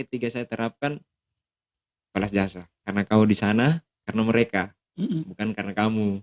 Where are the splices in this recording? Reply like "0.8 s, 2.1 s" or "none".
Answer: 2.7 s